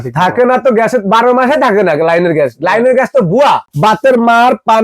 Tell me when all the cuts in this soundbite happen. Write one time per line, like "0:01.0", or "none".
0:03.7